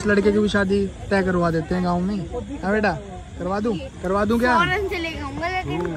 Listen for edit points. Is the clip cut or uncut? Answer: uncut